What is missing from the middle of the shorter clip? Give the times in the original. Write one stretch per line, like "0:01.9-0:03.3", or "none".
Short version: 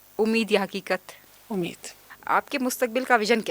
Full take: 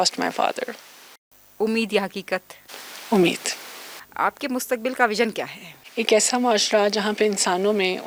0:03.0-0:03.4